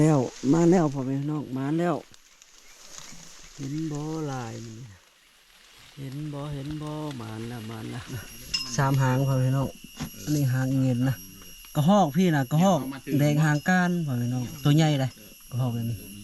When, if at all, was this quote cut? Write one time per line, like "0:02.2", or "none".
0:08.1